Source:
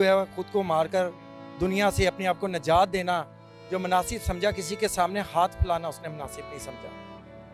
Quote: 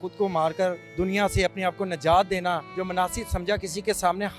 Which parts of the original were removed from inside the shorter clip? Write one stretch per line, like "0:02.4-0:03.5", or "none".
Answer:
0:01.2-0:01.5
0:03.3-0:03.6